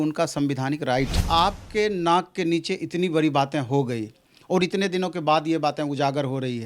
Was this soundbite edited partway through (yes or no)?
yes